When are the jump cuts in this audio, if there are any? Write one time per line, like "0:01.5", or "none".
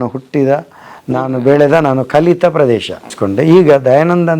0:03.2

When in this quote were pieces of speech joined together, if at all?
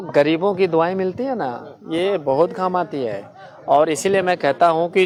none

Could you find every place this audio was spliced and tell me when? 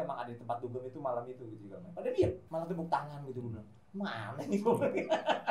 0:02.4

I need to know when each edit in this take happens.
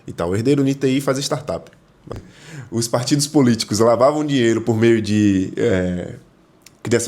0:02.2

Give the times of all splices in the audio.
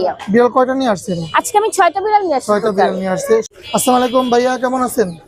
0:03.5

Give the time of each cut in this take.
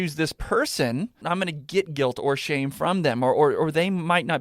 0:01.2

